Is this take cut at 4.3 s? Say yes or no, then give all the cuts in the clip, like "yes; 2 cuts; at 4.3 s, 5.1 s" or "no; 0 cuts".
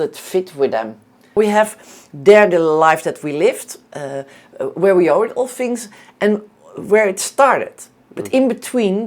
no; 1 cut; at 1.4 s